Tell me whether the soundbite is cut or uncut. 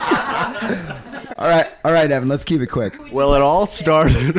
cut